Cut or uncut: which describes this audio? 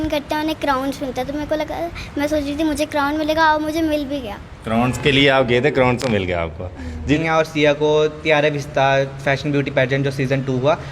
cut